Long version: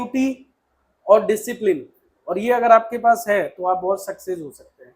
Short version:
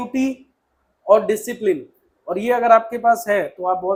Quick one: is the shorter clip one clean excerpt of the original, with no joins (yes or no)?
yes